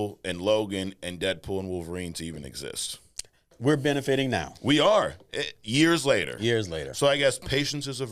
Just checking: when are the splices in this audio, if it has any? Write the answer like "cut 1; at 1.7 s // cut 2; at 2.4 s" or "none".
cut 1; at 3.5 s